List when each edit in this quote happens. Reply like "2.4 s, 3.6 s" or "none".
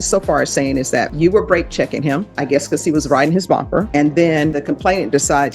1.1 s, 3.9 s, 4.6 s

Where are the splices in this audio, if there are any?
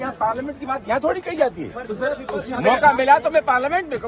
none

